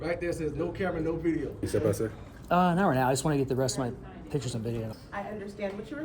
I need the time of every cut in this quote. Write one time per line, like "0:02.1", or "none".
0:01.6
0:04.8